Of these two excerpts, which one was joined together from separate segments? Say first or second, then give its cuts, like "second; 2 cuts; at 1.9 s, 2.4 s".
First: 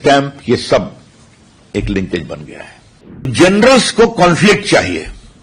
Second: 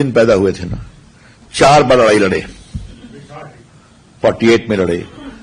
first; 1 cut; at 3.3 s